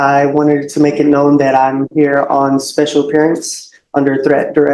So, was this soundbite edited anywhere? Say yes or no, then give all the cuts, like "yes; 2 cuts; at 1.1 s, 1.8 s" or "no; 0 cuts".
no; 0 cuts